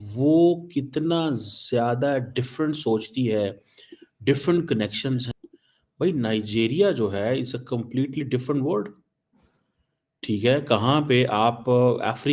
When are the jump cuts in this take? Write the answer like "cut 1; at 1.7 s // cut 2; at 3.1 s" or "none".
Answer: cut 1; at 5.3 s